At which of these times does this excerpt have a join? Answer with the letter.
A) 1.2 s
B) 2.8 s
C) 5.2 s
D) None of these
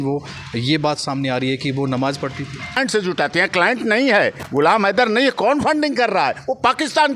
B